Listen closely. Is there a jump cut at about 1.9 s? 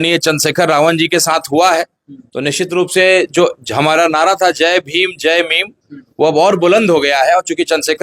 no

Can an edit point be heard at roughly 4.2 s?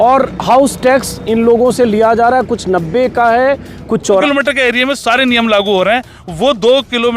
yes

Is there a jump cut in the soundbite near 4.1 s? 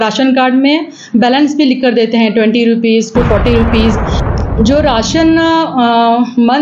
yes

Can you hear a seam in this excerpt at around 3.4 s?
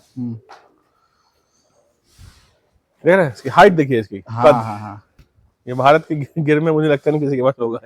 no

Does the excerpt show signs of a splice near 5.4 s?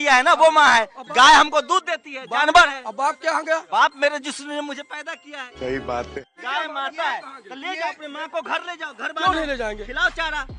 yes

